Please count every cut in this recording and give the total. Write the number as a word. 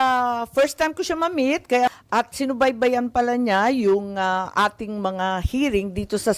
one